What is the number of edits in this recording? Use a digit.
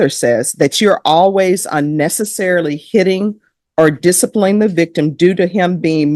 0